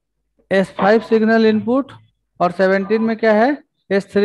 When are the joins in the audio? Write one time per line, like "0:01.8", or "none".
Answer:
none